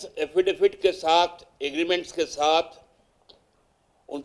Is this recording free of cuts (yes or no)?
yes